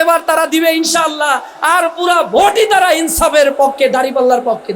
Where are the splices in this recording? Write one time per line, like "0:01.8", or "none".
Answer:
none